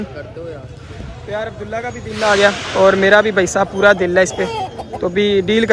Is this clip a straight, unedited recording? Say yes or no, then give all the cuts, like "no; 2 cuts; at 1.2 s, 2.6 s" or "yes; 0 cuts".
yes; 0 cuts